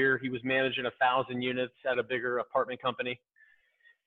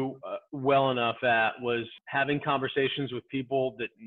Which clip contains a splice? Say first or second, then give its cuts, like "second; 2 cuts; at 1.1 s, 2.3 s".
second; 1 cut; at 1.9 s